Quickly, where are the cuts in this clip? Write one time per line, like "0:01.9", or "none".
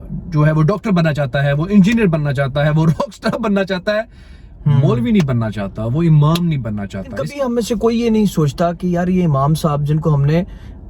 0:07.2